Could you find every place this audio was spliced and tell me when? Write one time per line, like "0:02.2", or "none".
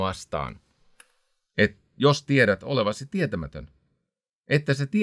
none

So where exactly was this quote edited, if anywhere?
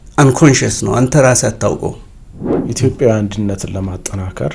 0:02.6

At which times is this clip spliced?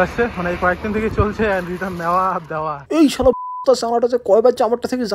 none

